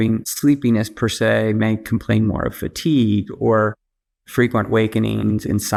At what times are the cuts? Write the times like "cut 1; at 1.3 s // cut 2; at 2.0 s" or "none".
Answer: none